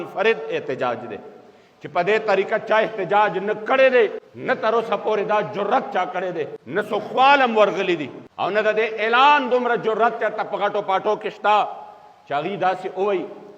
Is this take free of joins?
yes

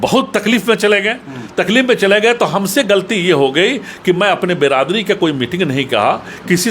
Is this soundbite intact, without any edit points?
yes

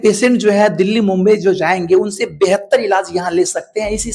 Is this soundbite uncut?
yes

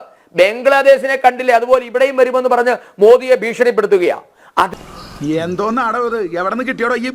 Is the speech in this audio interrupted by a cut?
no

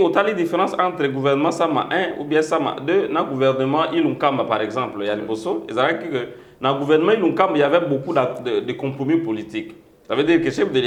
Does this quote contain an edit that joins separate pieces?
no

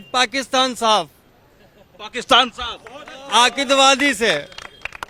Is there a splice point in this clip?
no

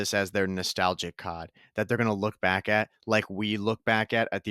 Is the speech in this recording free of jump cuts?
yes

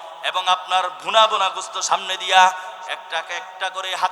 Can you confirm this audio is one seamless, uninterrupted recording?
yes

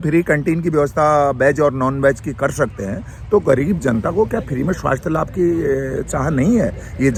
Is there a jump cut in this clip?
no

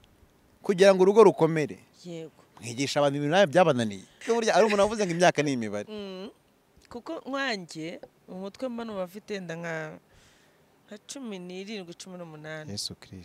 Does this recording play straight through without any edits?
no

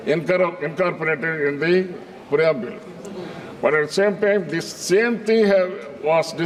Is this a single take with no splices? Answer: yes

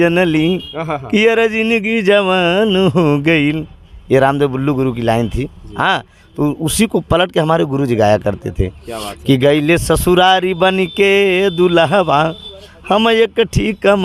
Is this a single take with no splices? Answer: yes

